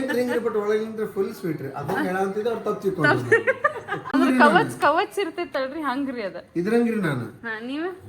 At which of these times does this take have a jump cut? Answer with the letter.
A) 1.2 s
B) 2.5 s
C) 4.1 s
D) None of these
C